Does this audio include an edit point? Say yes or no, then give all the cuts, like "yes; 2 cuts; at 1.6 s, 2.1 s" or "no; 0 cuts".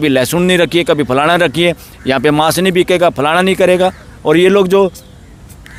no; 0 cuts